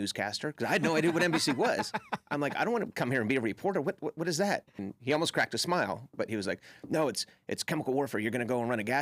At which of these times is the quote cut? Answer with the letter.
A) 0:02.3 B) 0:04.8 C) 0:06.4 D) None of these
B